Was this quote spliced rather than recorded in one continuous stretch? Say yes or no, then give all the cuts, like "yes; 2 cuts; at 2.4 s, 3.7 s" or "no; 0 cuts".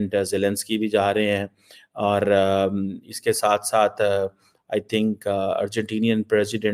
no; 0 cuts